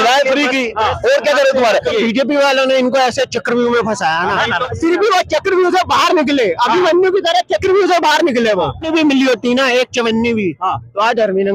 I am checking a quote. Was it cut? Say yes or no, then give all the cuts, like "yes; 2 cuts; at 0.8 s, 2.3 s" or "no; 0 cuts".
yes; 3 cuts; at 1.9 s, 4.6 s, 8.8 s